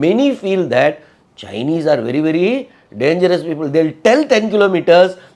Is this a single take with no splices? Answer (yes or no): yes